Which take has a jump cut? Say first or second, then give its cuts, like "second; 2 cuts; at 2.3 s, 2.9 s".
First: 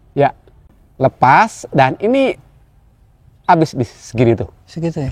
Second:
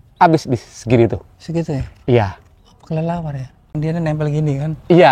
second; 1 cut; at 3.7 s